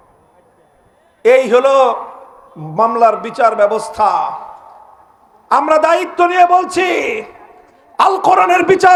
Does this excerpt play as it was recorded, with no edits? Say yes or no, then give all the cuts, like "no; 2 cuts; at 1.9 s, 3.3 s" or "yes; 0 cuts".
yes; 0 cuts